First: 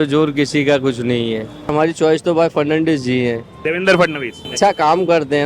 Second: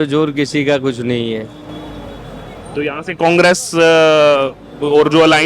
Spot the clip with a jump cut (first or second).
first